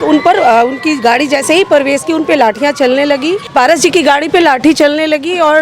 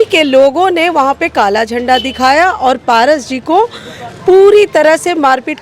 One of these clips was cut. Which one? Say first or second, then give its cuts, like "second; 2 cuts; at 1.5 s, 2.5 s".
first; 1 cut; at 3.4 s